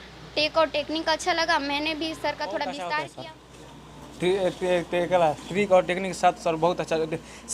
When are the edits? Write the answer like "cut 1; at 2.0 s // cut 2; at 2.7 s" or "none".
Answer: cut 1; at 3.1 s